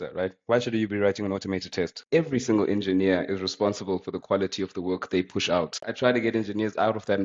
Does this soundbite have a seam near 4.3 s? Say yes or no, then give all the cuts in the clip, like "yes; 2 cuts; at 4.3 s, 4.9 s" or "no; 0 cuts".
no; 2 cuts; at 2.0 s, 5.8 s